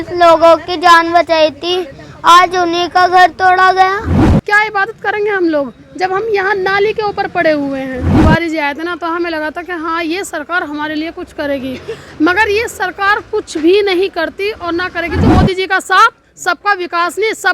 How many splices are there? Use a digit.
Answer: 3